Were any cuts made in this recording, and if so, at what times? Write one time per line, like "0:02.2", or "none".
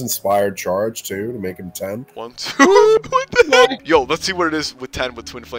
none